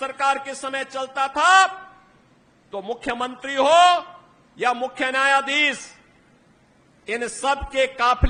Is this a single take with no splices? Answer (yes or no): yes